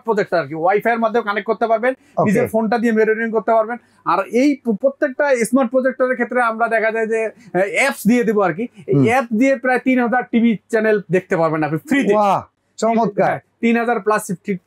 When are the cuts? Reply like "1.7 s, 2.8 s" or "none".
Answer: none